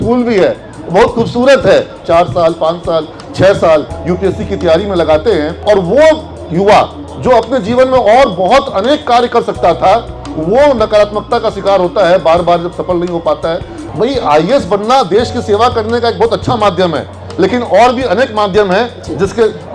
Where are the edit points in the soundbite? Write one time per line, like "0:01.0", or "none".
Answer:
0:02.0
0:05.5
0:13.7